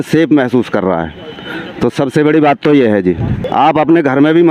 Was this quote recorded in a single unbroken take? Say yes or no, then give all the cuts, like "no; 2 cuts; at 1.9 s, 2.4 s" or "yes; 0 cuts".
no; 1 cut; at 3.4 s